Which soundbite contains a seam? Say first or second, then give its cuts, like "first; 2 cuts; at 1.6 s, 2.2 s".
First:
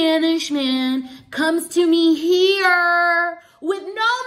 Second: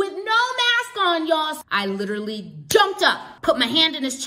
second; 2 cuts; at 1.6 s, 3.3 s